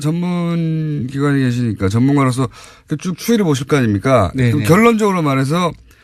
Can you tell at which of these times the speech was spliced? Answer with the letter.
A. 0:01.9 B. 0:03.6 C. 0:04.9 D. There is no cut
B